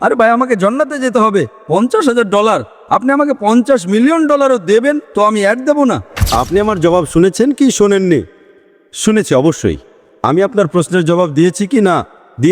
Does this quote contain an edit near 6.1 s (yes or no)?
yes